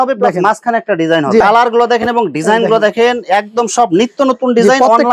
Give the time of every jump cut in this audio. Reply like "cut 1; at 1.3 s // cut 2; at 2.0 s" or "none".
cut 1; at 1.4 s